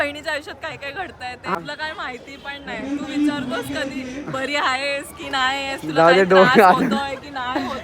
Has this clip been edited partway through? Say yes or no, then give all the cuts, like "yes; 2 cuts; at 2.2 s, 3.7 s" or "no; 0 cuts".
yes; 1 cut; at 1.5 s